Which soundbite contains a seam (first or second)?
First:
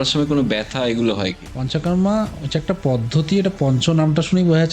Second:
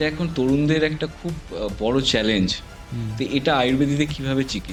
first